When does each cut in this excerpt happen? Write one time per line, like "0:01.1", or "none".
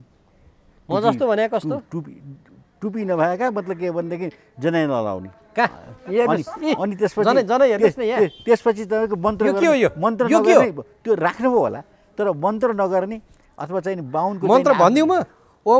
none